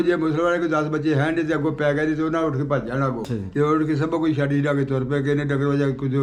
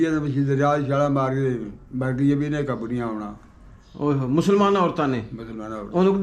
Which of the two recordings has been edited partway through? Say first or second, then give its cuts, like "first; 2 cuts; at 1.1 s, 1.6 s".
first; 1 cut; at 3.3 s